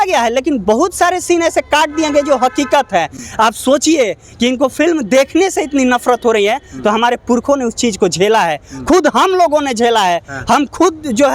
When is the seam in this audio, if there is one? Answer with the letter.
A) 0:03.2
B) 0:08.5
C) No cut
C